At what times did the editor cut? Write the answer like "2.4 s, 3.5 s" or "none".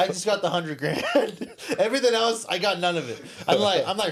none